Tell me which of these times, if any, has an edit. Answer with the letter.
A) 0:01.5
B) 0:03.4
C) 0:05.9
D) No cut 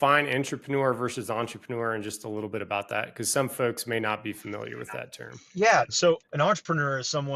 C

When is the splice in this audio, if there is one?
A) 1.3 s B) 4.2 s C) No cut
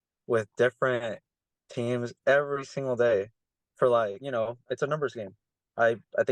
B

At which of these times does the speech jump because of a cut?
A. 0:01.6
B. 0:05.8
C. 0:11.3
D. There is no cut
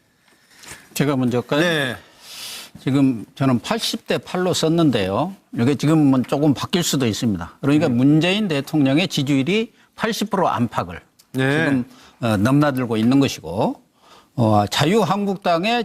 A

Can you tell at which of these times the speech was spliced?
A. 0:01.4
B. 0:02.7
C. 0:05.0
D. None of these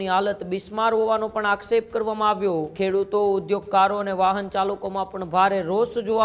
B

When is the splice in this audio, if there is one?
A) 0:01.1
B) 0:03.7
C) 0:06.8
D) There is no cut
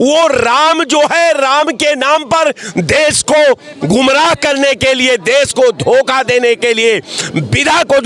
D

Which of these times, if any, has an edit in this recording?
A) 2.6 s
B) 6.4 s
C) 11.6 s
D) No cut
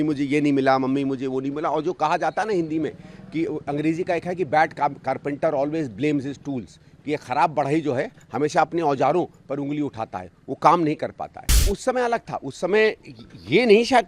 C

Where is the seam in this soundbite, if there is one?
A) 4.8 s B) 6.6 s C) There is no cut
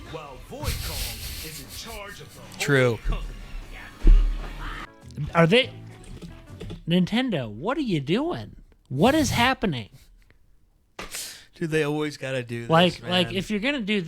A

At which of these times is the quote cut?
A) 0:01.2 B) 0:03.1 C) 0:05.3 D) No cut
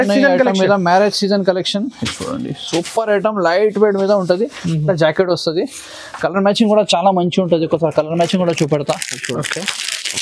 D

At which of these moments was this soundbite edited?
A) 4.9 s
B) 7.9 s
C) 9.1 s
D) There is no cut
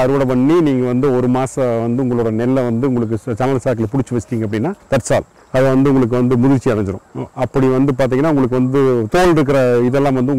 C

